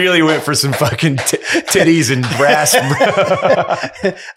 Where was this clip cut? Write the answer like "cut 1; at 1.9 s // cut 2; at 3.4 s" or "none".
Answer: none